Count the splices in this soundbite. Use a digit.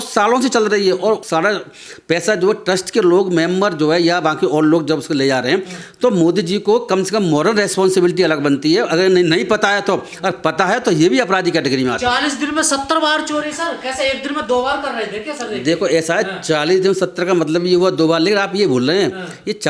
0